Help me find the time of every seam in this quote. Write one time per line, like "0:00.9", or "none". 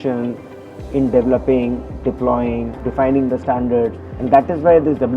0:02.8